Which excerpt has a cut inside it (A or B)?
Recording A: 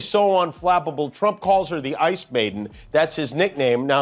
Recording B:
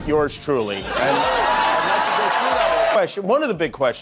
B